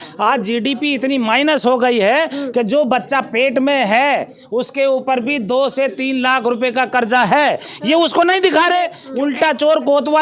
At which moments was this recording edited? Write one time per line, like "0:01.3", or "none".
0:09.0